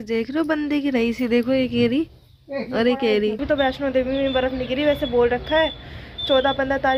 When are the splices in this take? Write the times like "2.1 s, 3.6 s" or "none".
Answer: 3.4 s